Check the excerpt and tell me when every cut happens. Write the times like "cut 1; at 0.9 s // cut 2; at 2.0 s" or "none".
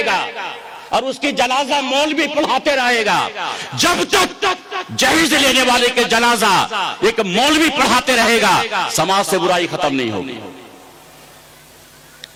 none